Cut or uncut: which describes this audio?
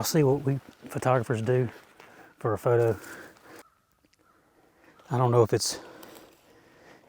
cut